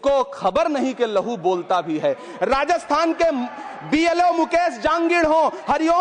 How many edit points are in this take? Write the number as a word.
zero